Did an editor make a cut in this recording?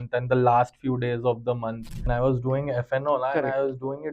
yes; 1 cut; at 2.1 s

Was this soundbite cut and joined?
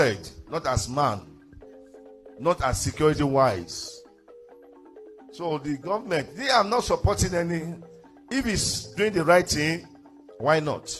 no; 0 cuts

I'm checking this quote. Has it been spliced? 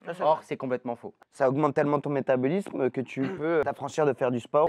yes; 2 cuts; at 1.1 s, 3.6 s

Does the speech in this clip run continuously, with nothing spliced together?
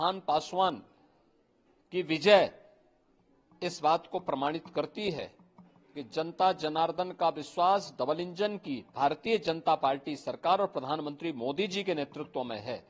yes; 0 cuts

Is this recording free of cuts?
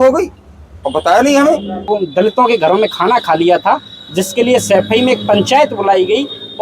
no; 1 cut; at 1.9 s

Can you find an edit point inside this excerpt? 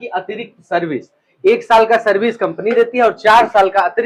no; 0 cuts

